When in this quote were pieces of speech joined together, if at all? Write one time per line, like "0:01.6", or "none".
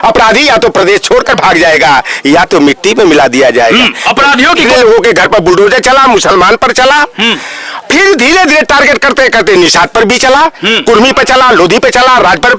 0:04.6